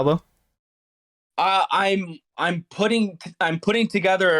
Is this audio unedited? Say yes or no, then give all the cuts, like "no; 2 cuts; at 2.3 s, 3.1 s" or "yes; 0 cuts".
yes; 0 cuts